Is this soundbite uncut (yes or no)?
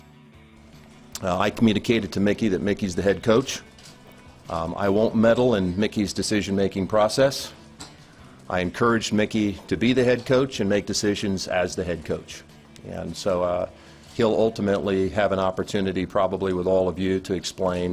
no